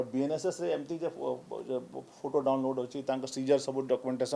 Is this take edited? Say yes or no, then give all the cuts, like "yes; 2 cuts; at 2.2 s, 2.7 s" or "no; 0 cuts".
no; 0 cuts